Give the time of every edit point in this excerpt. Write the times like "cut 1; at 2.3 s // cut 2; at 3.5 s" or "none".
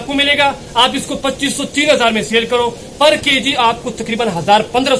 none